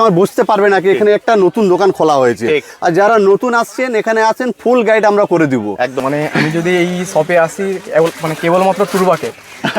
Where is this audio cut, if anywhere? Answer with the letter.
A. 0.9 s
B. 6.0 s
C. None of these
B